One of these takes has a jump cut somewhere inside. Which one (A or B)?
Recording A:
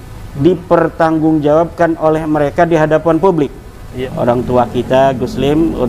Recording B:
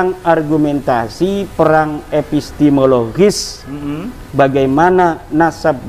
A